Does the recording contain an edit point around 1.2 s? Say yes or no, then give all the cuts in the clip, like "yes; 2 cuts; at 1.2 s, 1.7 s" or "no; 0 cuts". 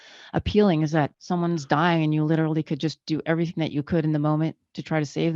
yes; 1 cut; at 1.2 s